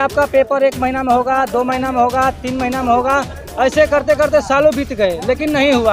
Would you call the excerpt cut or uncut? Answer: uncut